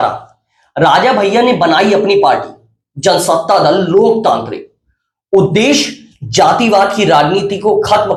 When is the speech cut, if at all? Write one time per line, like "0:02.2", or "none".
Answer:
none